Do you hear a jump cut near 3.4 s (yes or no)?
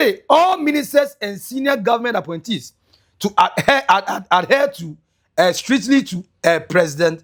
no